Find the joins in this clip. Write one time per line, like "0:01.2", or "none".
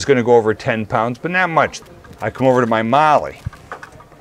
0:01.8